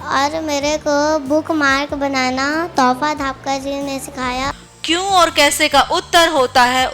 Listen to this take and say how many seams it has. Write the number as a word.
one